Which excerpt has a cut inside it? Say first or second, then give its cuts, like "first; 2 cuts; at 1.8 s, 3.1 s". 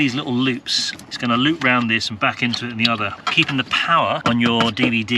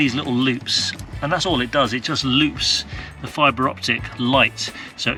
first; 3 cuts; at 1.0 s, 3.2 s, 4.2 s